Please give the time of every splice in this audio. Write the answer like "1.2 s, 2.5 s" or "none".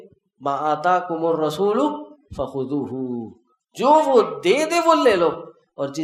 none